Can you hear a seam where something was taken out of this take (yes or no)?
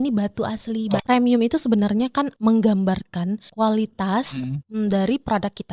yes